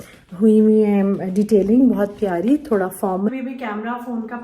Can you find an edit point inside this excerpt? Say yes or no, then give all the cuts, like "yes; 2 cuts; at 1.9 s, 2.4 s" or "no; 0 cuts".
yes; 1 cut; at 3.3 s